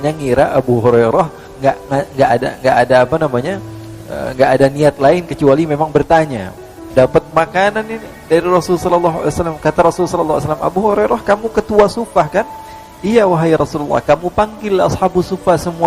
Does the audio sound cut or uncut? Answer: cut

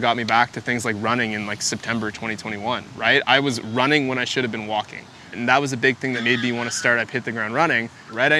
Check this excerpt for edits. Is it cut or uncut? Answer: uncut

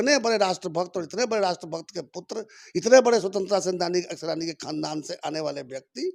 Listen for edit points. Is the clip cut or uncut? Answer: uncut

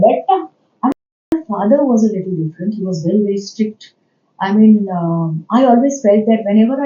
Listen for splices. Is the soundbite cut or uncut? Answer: cut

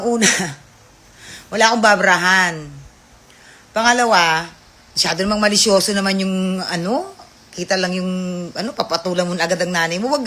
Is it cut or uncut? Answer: uncut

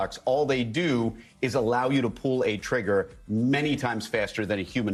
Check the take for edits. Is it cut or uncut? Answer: uncut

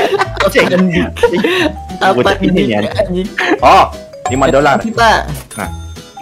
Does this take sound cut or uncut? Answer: cut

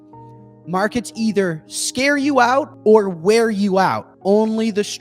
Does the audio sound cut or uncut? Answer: cut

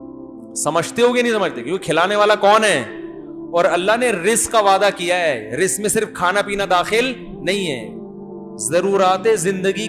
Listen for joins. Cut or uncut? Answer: uncut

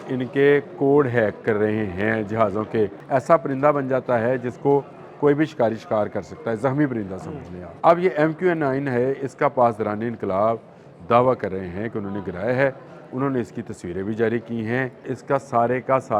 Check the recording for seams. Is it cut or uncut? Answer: cut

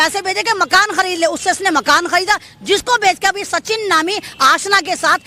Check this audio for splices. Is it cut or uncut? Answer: uncut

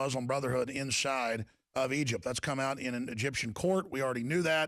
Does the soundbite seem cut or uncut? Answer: cut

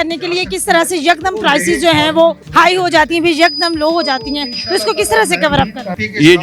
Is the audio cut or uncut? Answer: cut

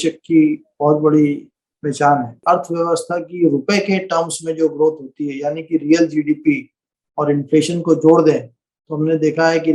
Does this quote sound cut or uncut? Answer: cut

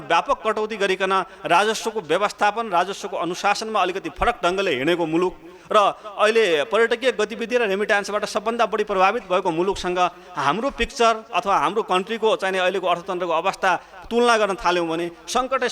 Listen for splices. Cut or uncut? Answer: uncut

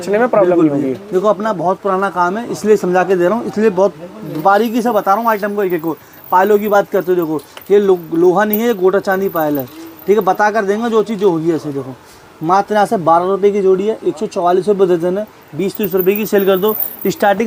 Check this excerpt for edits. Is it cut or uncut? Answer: uncut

